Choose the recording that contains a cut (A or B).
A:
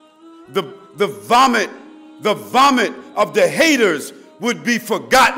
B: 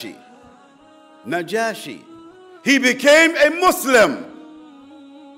B